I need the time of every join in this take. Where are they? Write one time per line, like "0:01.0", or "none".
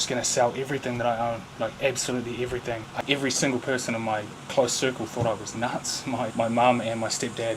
0:02.9
0:06.3

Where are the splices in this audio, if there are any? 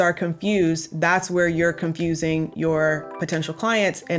none

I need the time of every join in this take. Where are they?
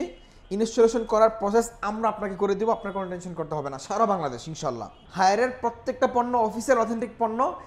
0:05.0

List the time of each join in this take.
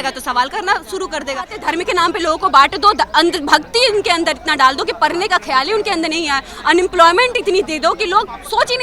0:01.6

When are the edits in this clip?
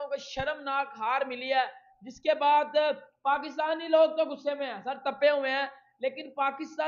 none

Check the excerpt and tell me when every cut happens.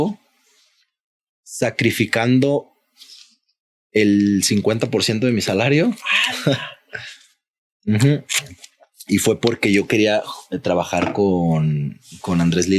none

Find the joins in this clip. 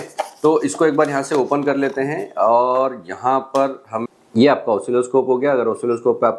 0:03.9

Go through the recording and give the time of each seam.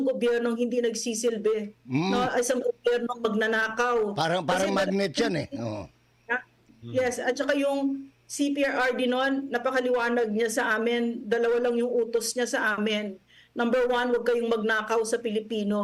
none

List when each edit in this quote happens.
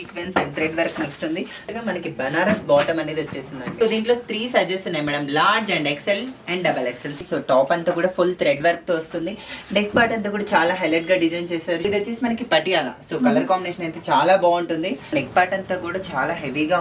0:01.7
0:03.6
0:07.2
0:11.8
0:15.1

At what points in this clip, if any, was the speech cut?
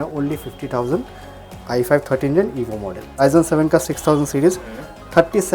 0:03.2

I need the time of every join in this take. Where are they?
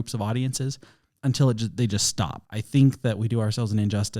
0:02.4

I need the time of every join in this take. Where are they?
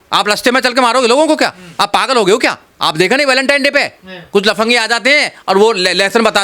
0:02.7

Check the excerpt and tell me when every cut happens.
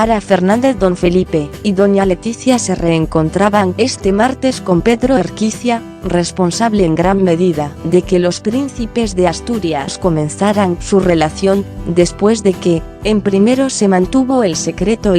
0:08.9

